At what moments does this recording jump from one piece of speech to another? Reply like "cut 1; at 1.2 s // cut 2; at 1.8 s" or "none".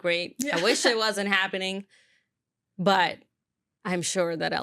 none